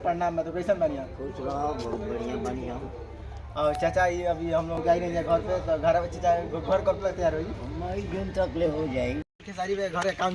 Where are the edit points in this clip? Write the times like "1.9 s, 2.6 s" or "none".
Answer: 4.7 s, 9.3 s